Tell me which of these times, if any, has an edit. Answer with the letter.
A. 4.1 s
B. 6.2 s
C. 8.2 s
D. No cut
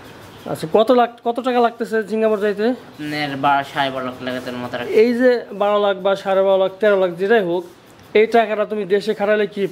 D